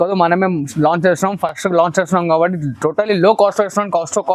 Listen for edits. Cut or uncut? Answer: uncut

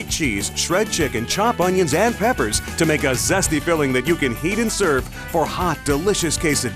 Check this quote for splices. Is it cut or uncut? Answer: uncut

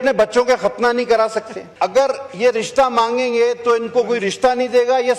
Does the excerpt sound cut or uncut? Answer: cut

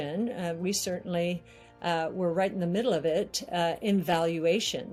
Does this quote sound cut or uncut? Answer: uncut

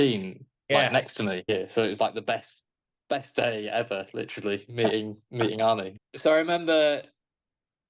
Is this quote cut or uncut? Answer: cut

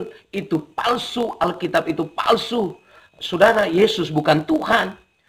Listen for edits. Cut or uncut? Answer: cut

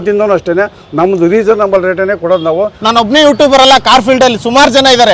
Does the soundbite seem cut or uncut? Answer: cut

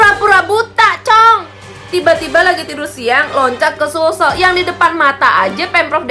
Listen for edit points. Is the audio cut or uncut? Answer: cut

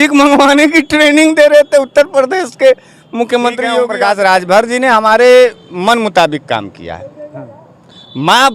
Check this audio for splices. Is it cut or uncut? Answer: cut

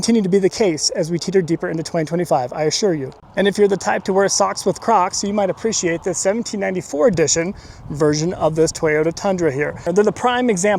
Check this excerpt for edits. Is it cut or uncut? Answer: cut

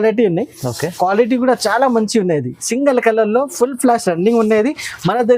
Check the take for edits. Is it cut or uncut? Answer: uncut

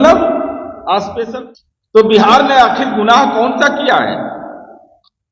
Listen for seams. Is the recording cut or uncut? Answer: cut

